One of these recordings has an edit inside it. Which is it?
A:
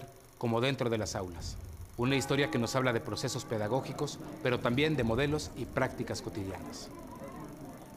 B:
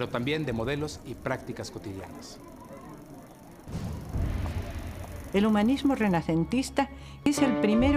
A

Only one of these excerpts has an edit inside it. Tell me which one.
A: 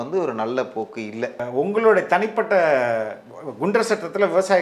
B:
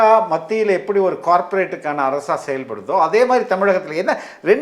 A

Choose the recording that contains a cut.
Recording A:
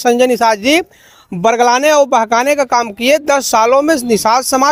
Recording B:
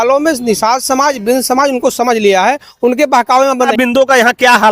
B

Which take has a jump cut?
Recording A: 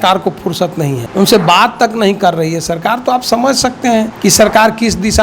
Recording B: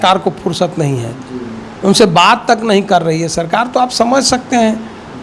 A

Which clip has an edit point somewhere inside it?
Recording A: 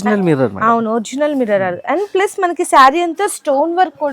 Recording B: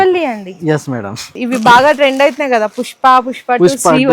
B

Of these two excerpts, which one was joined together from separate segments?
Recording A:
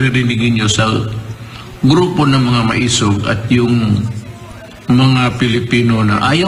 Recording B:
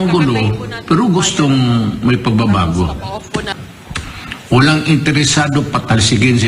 B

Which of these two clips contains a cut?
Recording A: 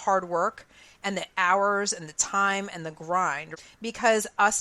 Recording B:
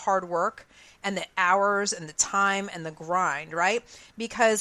A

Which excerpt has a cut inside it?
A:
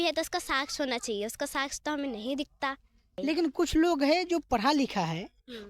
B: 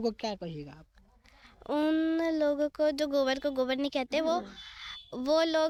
A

